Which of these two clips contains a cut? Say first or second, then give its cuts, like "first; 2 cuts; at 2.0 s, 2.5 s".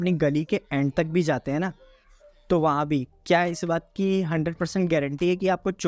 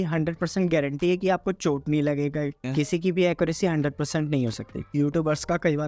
second; 2 cuts; at 2.6 s, 4.7 s